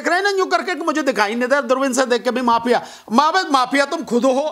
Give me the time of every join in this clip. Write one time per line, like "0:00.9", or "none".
none